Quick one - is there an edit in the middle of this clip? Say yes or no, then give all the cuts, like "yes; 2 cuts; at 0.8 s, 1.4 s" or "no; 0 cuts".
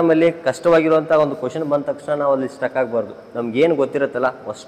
no; 0 cuts